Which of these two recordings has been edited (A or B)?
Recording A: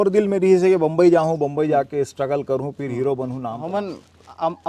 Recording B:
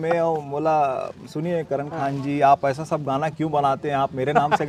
A